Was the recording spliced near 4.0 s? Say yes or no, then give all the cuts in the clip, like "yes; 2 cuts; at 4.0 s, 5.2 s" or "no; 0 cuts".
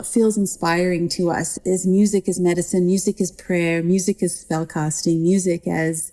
no; 1 cut; at 1.5 s